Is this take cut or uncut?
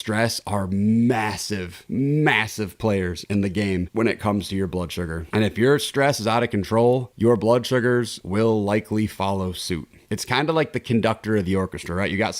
uncut